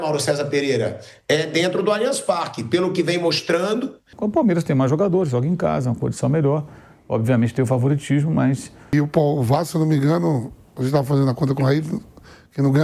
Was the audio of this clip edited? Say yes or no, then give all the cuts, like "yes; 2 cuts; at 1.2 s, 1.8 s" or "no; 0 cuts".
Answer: yes; 2 cuts; at 4.0 s, 8.9 s